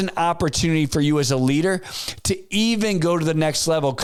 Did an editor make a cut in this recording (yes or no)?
no